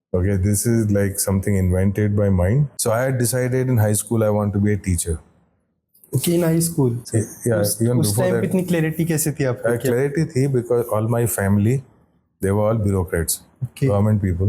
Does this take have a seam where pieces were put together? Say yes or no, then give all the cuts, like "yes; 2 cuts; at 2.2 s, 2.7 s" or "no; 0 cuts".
yes; 1 cut; at 2.7 s